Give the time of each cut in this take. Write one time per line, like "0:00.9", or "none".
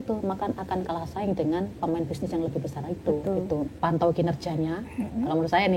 0:03.7